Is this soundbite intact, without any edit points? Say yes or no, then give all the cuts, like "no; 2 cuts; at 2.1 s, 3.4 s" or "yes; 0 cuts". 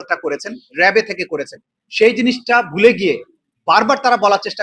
yes; 0 cuts